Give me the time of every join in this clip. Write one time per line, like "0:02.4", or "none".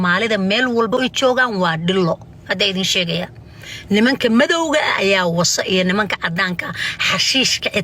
0:00.9